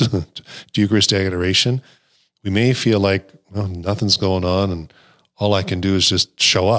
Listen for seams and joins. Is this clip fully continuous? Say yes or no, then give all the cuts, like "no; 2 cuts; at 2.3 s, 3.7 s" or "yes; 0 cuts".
yes; 0 cuts